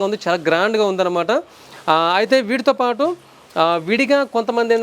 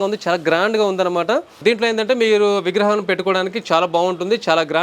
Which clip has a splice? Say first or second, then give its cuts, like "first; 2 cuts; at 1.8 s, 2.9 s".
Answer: second; 1 cut; at 1.6 s